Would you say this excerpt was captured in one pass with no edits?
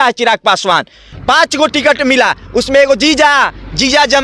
no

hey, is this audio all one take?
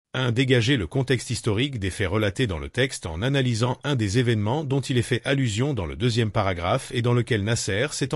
yes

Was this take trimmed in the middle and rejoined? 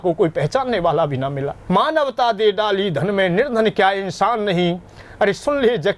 yes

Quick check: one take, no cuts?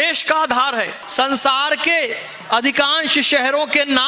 no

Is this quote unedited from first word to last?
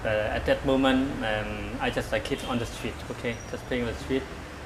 no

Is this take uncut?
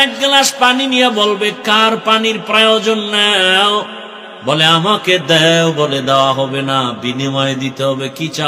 yes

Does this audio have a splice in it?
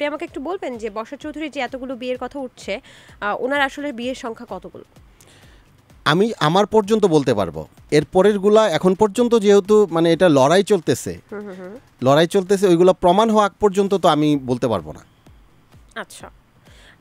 no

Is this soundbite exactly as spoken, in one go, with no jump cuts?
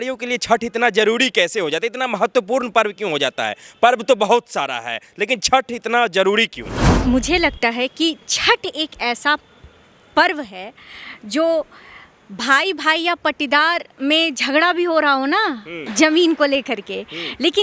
no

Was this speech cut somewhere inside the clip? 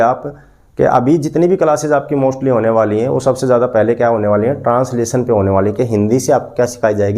no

